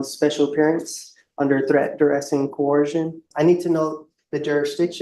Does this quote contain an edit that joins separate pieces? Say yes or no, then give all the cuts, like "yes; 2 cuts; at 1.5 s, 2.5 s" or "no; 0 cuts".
yes; 1 cut; at 3.3 s